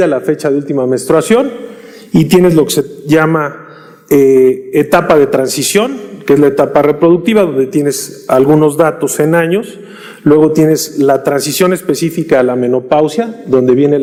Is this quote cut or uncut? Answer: uncut